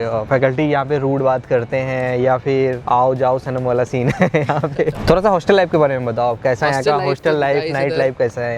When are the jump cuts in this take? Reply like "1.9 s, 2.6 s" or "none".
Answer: 5.0 s